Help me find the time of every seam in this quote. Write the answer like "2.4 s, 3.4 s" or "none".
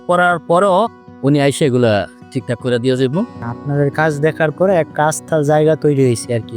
3.4 s